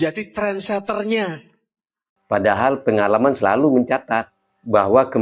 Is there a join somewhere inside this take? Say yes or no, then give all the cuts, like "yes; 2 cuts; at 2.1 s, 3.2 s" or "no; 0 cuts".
yes; 1 cut; at 2.1 s